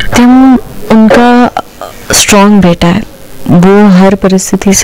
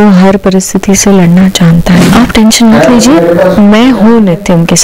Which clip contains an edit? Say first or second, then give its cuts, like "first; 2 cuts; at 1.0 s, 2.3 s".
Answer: second; 1 cut; at 2.1 s